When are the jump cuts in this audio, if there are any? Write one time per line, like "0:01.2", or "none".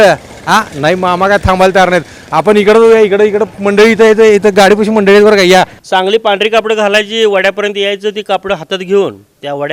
0:05.8